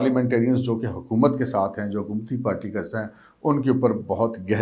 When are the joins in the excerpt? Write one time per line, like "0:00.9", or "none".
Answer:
none